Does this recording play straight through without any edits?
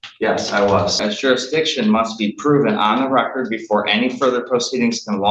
no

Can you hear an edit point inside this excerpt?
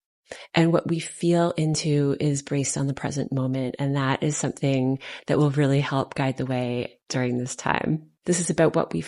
yes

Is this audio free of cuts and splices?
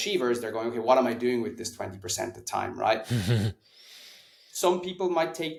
yes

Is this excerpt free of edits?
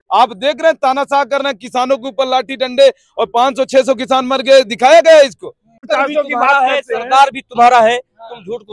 no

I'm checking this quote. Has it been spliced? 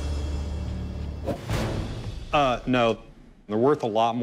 yes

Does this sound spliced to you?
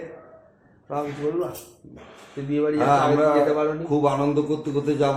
no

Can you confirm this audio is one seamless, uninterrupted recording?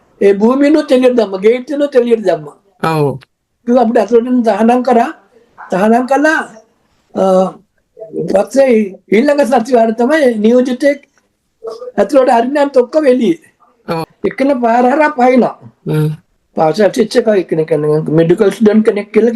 no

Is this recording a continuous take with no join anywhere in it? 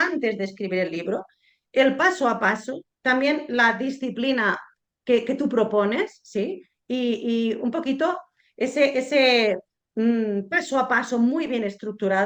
yes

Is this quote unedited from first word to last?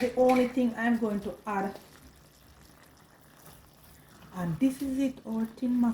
no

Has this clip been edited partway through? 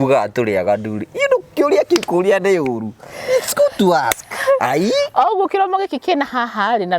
no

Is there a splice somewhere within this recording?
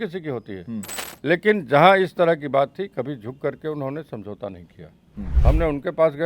yes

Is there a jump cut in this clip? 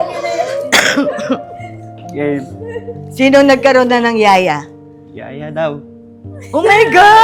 no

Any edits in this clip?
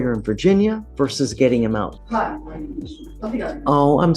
yes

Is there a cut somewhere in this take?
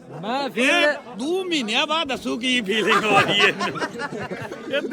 no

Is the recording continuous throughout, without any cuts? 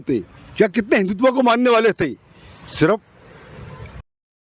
yes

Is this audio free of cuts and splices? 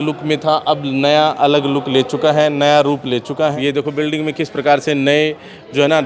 no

